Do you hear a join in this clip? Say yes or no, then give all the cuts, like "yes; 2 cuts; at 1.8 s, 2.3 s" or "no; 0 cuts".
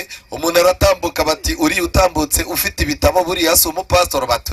no; 0 cuts